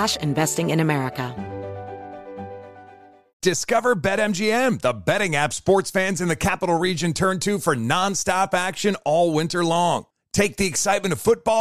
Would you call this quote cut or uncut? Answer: cut